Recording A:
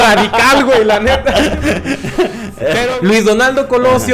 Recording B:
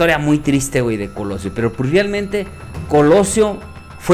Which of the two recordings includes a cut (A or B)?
A